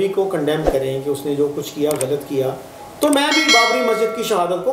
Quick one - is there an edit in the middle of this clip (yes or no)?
no